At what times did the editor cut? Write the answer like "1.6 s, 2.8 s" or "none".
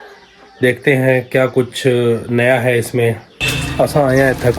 3.6 s